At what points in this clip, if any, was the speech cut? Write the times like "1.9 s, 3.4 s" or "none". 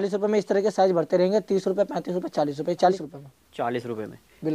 3.0 s